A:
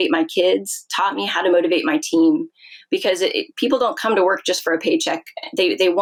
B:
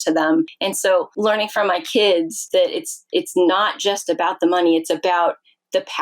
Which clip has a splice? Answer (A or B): B